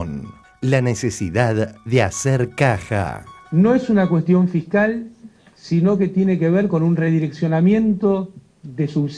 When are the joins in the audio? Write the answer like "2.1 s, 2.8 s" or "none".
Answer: 3.4 s